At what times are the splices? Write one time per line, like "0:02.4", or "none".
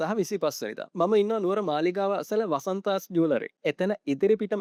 none